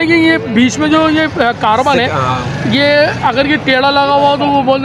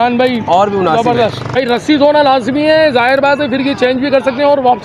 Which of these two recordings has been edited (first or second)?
second